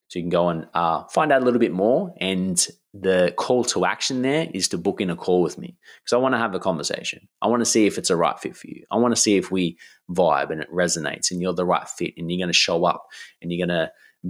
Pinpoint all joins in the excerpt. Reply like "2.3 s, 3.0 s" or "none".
none

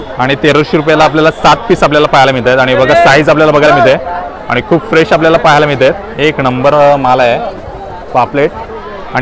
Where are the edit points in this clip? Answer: none

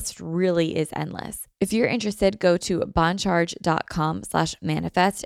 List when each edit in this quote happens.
1.4 s

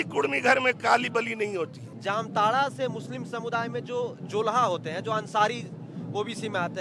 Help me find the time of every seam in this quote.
1.9 s

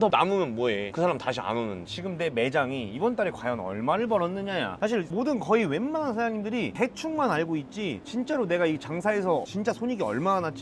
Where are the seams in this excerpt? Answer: 1.9 s

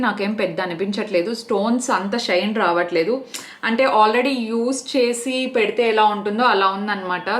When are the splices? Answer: none

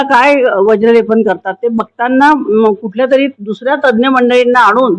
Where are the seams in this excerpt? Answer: none

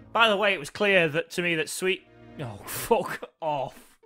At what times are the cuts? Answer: none

